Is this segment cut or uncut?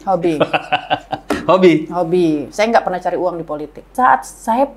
cut